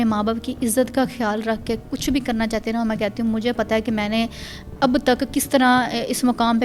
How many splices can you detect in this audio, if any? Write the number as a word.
zero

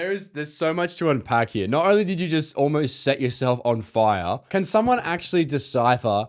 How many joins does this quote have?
one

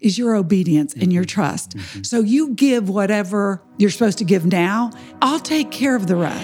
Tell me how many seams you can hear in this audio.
two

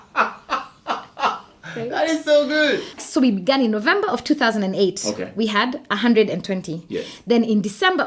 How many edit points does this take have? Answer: one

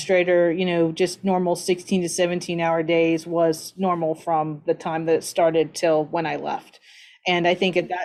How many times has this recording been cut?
zero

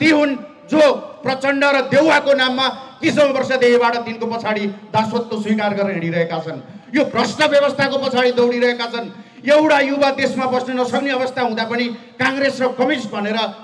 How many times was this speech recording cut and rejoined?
zero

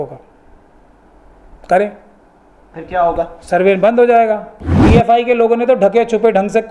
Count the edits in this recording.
one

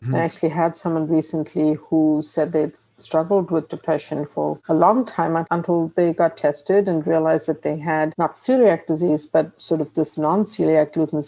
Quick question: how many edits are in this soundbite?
zero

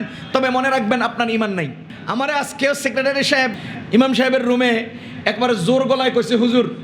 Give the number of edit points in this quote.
two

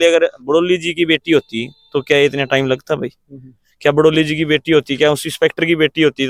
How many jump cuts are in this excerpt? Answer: zero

